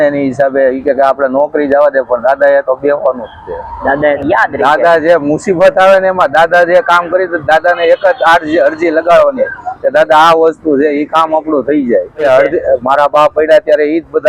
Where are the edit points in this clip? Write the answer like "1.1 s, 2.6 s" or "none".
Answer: 4.2 s, 12.2 s